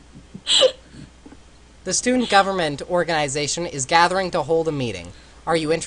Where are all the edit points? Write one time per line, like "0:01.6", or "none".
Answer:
0:04.6